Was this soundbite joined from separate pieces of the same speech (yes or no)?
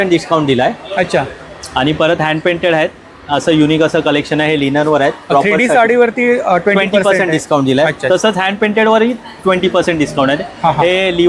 no